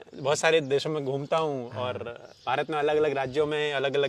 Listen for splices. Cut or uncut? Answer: uncut